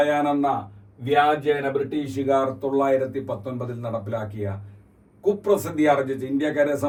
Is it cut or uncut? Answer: uncut